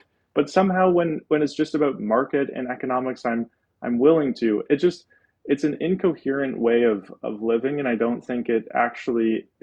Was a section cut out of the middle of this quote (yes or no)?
no